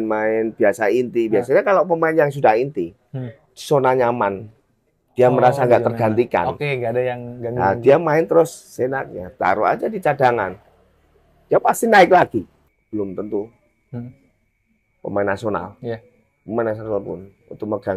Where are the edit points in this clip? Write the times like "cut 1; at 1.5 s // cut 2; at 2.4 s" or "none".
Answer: cut 1; at 12.7 s